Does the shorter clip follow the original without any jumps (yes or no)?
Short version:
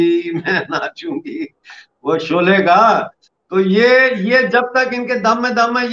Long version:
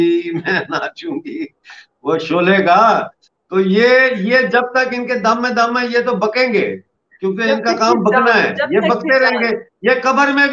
yes